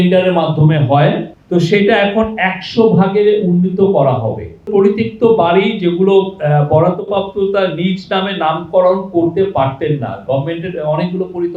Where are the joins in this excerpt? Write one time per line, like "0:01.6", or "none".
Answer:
0:01.3
0:04.7